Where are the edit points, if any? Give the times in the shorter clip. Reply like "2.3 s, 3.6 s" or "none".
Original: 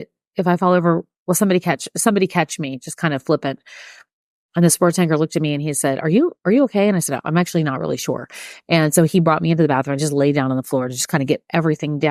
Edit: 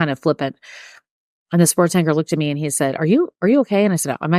none